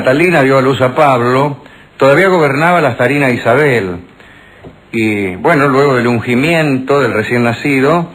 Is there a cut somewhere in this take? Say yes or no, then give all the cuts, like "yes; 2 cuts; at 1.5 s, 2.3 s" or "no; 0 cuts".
no; 0 cuts